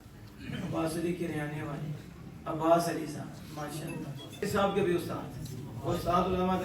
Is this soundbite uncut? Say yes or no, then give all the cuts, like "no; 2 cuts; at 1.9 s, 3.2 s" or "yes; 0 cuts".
no; 1 cut; at 4.4 s